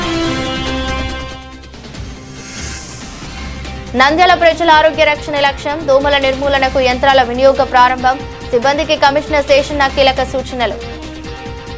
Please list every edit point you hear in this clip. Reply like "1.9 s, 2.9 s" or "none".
3.0 s, 3.9 s, 10.9 s